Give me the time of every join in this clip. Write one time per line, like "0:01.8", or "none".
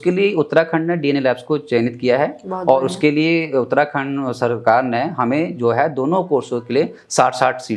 none